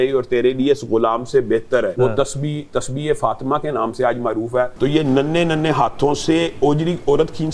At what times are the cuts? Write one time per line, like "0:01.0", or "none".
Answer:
0:01.9
0:04.7